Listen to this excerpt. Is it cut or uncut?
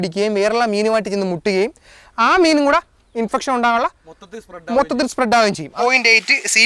cut